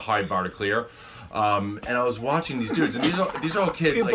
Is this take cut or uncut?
uncut